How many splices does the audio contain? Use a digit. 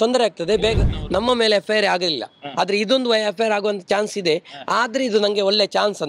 1